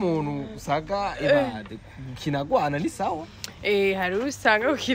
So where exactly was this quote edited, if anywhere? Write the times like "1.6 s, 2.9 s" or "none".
none